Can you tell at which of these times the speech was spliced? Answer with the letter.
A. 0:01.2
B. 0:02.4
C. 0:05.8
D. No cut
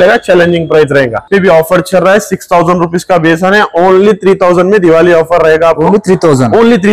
A